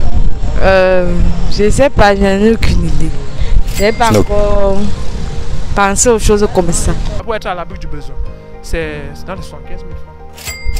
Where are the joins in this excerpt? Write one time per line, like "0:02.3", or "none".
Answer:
0:07.1